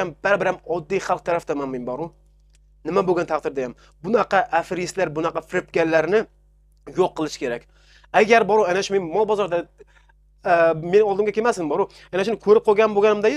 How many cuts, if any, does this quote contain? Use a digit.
0